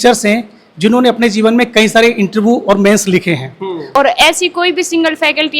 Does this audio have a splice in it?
yes; 1 cut; at 3.8 s

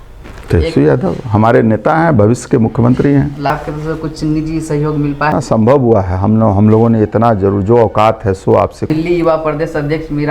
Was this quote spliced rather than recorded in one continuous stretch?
yes; 3 cuts; at 3.5 s, 5.3 s, 8.9 s

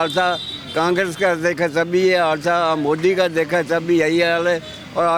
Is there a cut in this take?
no; 0 cuts

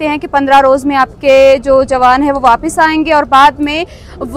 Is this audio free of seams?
yes; 0 cuts

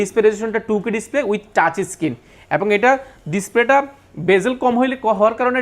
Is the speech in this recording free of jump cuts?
yes; 0 cuts

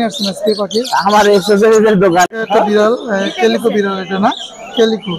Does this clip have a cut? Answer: yes; 1 cut; at 2.3 s

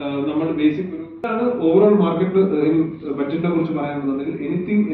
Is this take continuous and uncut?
no; 1 cut; at 1.1 s

